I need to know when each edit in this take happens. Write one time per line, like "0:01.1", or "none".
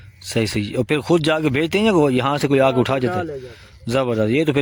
none